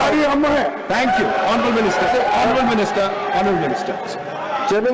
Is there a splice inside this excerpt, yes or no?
no